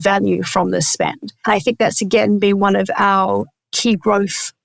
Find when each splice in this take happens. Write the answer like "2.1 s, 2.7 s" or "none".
1.4 s